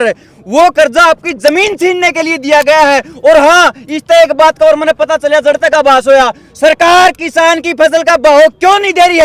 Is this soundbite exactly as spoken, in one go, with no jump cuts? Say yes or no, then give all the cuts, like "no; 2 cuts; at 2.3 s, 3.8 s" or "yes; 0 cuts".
yes; 0 cuts